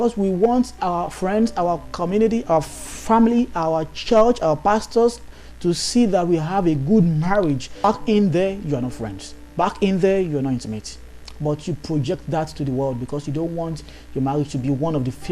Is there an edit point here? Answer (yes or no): yes